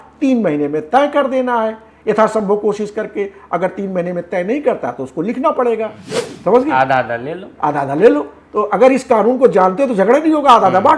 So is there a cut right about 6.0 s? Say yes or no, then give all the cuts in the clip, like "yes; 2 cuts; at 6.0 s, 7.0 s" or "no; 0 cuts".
yes; 1 cut; at 6.0 s